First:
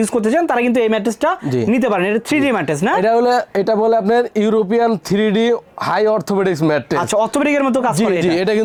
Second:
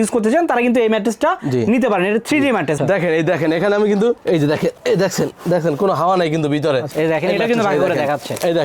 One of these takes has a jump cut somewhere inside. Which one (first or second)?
second